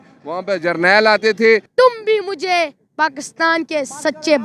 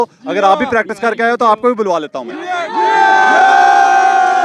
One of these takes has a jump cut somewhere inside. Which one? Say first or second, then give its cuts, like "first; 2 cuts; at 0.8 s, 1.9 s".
first; 1 cut; at 1.7 s